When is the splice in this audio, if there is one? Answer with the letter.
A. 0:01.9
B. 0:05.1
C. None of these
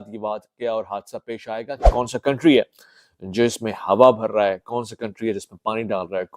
A